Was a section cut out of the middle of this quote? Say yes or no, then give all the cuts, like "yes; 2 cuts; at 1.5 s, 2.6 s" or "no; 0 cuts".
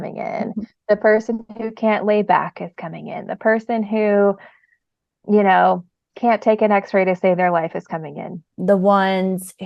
yes; 1 cut; at 8.4 s